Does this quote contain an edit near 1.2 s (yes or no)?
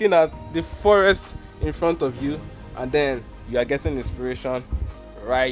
no